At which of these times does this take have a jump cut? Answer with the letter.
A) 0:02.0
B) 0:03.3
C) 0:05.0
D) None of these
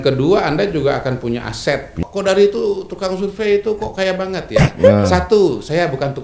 A